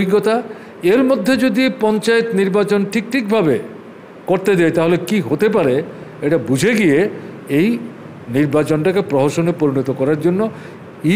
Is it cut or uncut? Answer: uncut